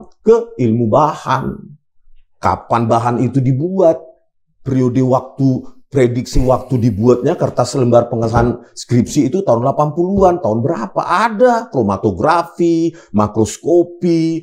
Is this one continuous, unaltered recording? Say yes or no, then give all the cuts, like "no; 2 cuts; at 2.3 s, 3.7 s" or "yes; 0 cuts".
yes; 0 cuts